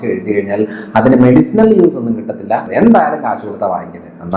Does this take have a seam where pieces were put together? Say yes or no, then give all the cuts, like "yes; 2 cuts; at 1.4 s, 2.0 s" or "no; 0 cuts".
yes; 1 cut; at 2.7 s